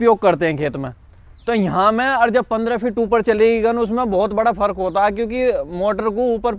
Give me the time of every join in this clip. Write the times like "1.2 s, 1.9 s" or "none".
none

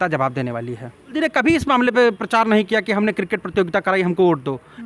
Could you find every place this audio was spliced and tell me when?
1.1 s

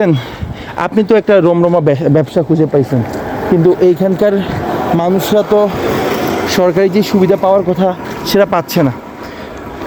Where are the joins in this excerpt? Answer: none

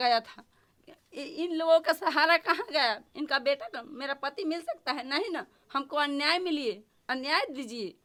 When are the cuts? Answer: none

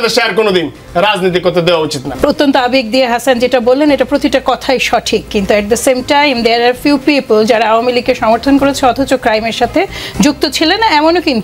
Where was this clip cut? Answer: 2.0 s

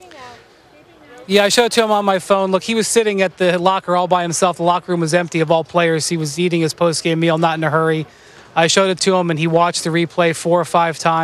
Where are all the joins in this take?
none

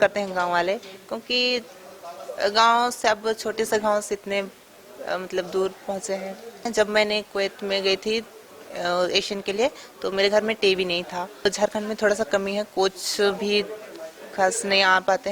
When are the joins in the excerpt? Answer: 6.7 s, 11.5 s

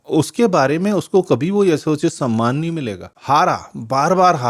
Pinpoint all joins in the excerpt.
3.1 s

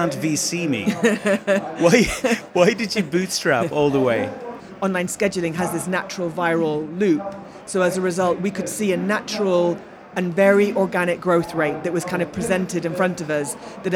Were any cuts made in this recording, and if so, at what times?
4.6 s

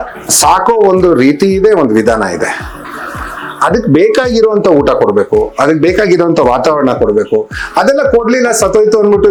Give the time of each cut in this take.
none

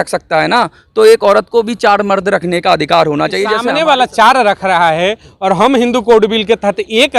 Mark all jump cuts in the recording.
3.5 s

